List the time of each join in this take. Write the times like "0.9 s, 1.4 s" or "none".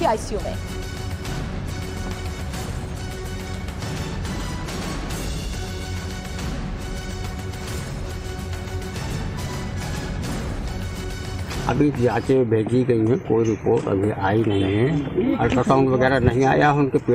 3.3 s